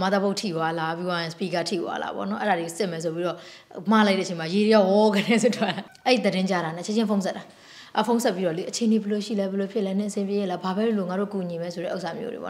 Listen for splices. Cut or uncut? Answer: cut